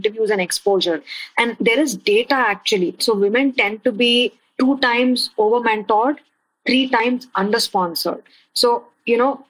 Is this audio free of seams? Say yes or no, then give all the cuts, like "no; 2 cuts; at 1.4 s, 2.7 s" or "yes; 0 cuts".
no; 3 cuts; at 1.0 s, 3.0 s, 8.2 s